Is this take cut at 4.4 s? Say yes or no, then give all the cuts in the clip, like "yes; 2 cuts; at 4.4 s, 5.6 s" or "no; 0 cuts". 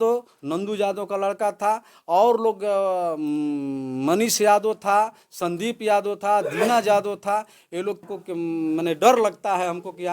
no; 1 cut; at 8.0 s